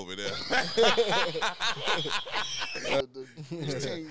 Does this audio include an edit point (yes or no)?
yes